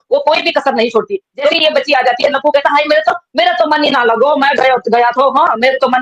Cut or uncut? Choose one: cut